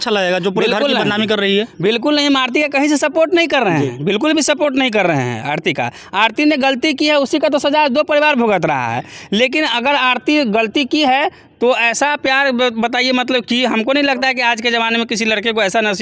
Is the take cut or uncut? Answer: uncut